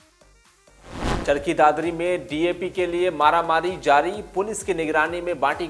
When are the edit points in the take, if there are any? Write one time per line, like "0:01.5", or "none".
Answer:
0:01.2